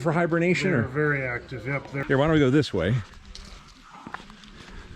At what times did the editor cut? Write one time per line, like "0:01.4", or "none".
0:01.9